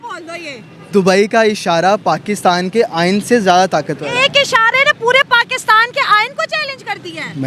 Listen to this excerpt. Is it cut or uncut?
uncut